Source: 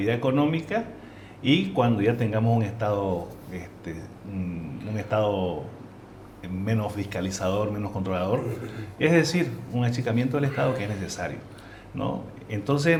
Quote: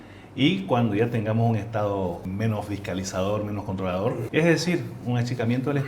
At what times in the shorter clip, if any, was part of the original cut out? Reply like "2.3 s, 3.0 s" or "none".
2.2 s, 4.2 s